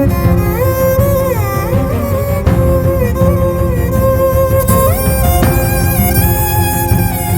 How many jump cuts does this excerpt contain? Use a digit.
0